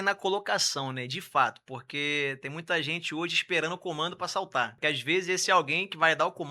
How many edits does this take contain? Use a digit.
1